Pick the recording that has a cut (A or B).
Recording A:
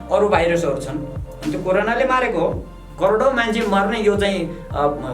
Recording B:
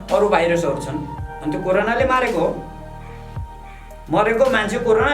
A